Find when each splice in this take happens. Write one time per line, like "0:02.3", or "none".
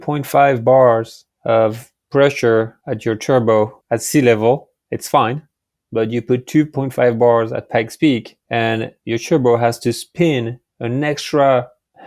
0:02.8
0:03.8
0:08.9